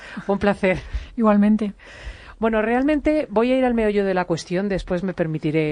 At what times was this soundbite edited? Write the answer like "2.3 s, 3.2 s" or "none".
4.6 s